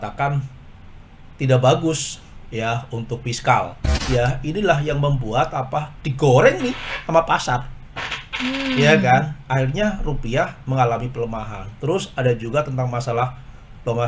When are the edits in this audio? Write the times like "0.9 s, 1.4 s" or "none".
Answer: 3.9 s